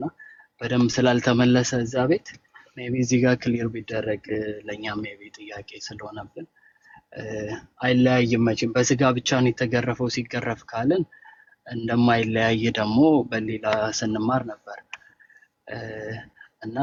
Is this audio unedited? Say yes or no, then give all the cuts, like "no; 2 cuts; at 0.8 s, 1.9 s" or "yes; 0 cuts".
yes; 0 cuts